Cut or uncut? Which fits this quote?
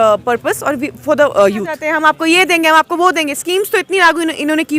cut